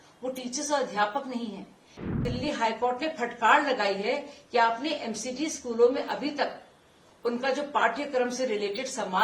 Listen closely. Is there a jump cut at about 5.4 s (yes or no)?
no